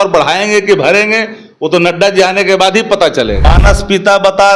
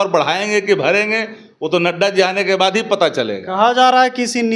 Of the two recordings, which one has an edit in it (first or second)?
first